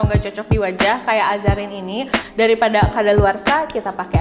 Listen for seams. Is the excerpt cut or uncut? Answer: cut